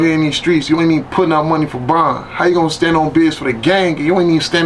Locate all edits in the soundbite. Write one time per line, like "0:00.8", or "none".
none